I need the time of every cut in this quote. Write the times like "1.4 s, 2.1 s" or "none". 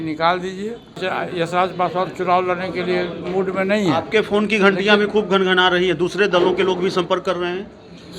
1.0 s